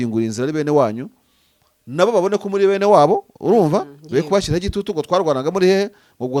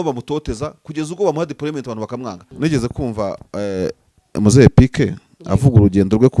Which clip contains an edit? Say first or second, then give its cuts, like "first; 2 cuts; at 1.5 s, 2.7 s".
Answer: second; 1 cut; at 2.4 s